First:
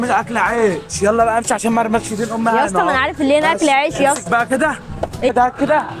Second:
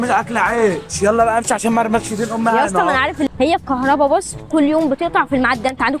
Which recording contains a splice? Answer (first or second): second